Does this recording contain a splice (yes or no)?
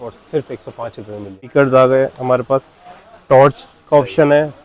yes